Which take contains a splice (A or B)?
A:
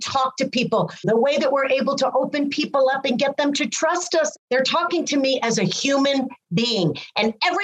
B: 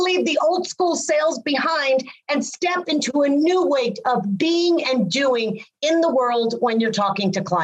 A